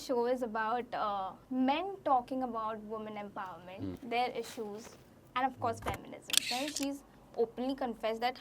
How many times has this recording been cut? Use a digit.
3